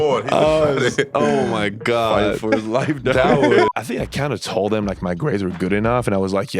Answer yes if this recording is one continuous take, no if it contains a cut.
no